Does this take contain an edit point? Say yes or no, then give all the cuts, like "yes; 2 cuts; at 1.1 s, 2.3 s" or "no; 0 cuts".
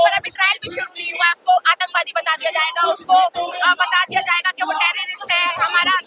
no; 0 cuts